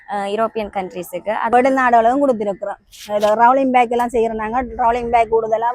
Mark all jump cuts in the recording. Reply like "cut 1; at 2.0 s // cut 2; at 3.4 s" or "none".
cut 1; at 1.5 s